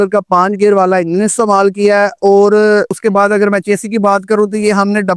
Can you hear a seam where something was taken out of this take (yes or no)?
no